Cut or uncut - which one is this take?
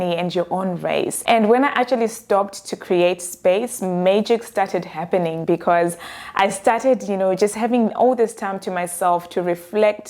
uncut